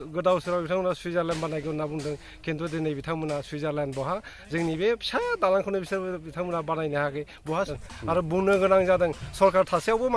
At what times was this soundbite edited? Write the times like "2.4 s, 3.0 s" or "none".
7.7 s